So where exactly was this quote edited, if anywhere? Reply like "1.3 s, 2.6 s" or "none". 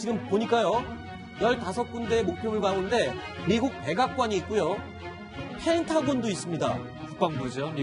6.2 s

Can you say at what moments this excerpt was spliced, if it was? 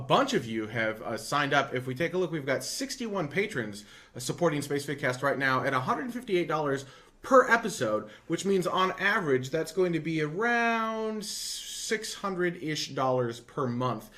6.7 s

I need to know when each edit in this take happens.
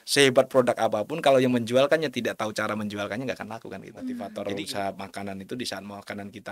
4.3 s

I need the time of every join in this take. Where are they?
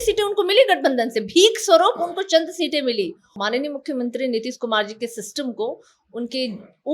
3.3 s

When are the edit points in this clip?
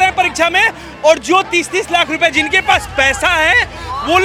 none

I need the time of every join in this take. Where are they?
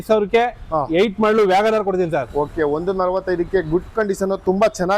none

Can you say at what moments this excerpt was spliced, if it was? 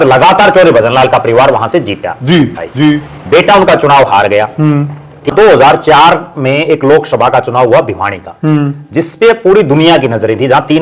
2.6 s, 5.3 s

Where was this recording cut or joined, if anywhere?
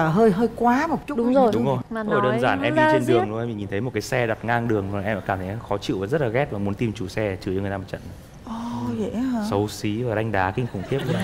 none

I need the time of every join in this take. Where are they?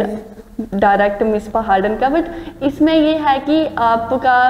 none

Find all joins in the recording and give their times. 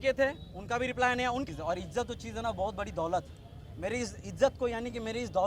1.5 s

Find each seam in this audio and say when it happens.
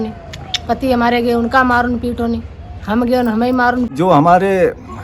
3.9 s

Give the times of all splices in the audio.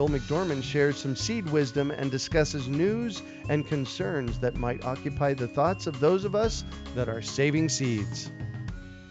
8.1 s

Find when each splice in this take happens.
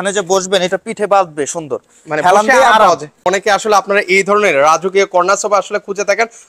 3.3 s

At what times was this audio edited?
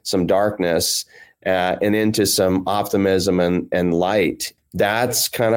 4.5 s

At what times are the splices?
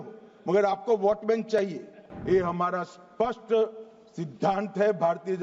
2.1 s

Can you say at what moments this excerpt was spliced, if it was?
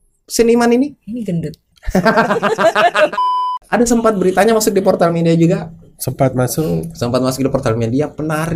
3.3 s

